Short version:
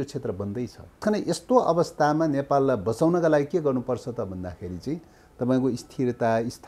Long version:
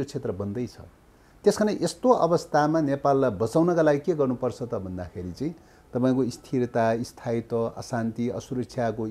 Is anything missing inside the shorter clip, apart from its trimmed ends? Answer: yes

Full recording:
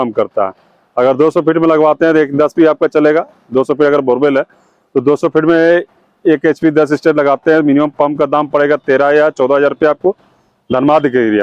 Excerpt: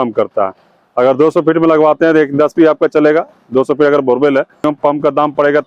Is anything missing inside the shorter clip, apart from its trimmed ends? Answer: yes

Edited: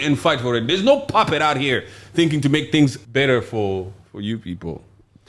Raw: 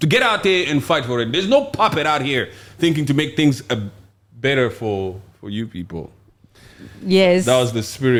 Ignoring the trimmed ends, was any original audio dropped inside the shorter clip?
yes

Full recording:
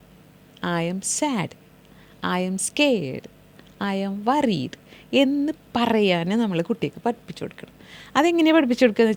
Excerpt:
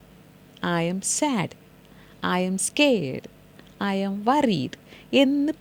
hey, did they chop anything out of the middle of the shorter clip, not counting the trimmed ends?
no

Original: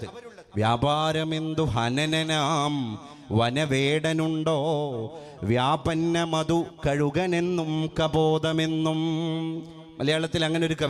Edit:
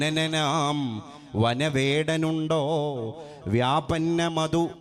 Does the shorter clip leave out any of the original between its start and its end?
no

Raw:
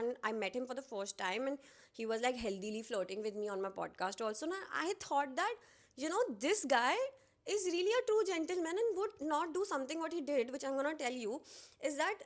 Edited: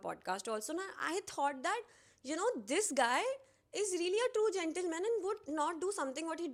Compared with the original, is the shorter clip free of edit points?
yes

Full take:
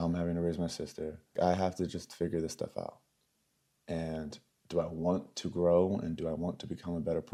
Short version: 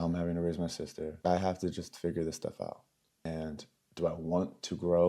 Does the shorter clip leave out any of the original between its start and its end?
yes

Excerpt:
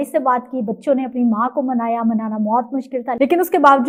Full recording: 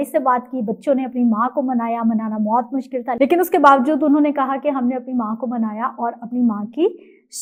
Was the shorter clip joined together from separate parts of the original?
no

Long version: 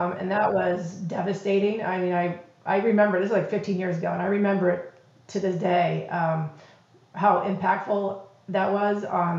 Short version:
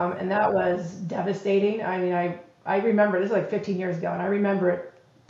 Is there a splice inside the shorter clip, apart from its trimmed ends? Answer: no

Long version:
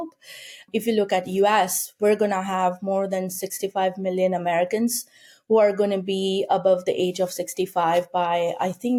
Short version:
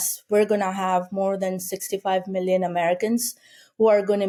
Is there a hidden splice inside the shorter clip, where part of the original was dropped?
no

